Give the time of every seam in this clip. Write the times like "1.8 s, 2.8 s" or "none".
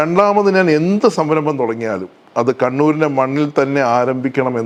none